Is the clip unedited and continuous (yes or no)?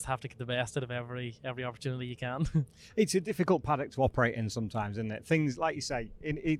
yes